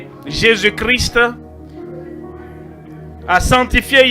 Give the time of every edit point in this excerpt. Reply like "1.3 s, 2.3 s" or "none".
1.4 s, 2.9 s